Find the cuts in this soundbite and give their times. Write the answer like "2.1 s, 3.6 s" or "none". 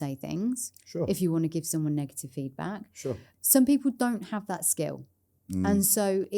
3.2 s